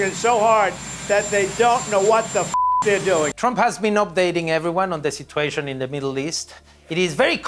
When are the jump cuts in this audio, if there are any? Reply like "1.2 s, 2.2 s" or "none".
3.4 s